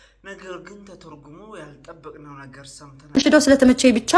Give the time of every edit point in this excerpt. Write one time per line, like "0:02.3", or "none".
0:03.2